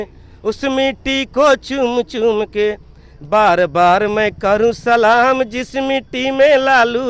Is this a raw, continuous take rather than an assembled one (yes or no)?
yes